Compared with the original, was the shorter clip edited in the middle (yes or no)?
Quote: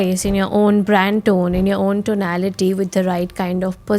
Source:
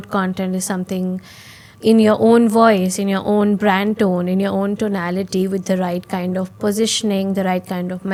no